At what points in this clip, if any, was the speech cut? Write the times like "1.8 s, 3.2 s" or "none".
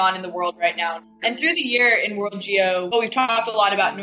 1.1 s, 3.1 s